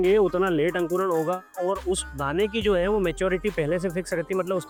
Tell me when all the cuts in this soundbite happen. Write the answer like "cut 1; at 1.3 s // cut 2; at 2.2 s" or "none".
none